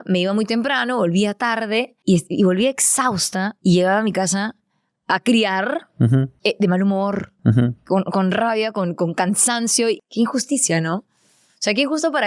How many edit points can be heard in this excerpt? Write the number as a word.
four